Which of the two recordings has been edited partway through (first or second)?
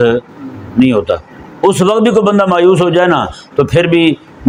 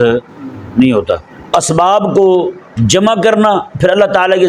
second